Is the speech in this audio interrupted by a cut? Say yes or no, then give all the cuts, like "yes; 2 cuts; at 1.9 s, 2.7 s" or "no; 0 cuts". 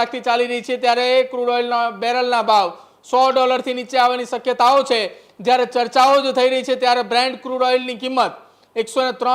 no; 0 cuts